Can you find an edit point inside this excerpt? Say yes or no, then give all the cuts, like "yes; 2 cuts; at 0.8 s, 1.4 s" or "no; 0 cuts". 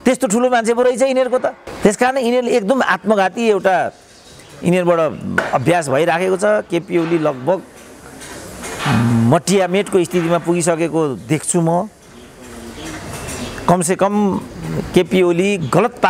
no; 0 cuts